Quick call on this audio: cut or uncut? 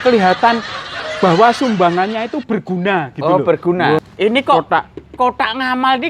cut